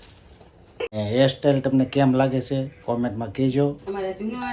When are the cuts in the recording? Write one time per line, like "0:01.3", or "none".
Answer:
0:00.9